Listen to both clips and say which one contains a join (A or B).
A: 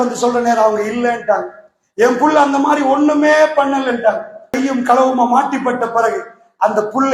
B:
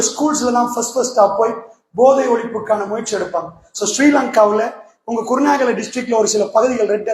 A